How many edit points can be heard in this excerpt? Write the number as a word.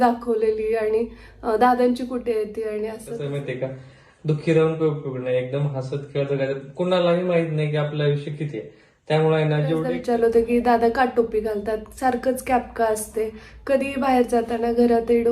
two